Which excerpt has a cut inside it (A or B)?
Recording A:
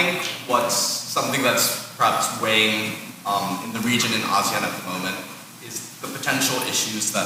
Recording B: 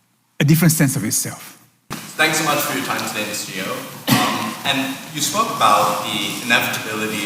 B